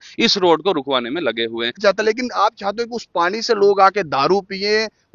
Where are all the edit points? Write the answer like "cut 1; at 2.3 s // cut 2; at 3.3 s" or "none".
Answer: cut 1; at 1.8 s